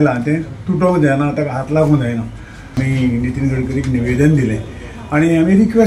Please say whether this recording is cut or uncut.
cut